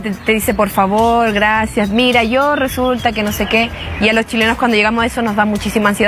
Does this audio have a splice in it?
no; 0 cuts

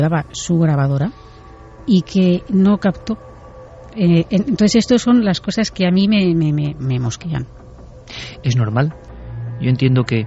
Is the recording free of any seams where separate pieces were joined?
no; 1 cut; at 9.1 s

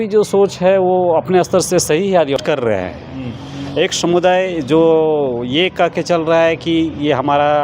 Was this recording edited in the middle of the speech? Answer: yes; 1 cut; at 2.4 s

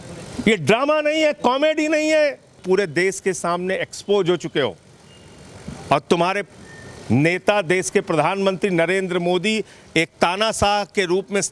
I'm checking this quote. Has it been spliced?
yes; 1 cut; at 2.6 s

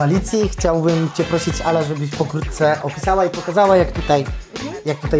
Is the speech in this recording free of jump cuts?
yes; 0 cuts

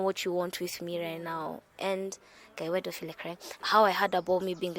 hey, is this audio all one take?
no; 1 cut; at 3.6 s

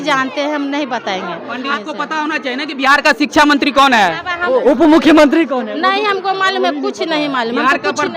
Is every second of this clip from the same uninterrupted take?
no; 2 cuts; at 1.7 s, 4.4 s

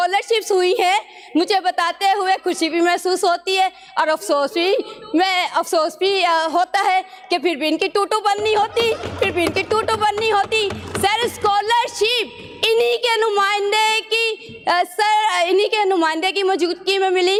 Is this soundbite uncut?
yes; 0 cuts

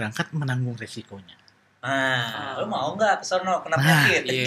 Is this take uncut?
yes; 0 cuts

